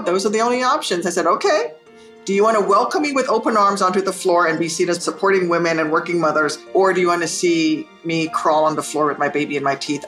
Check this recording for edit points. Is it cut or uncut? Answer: cut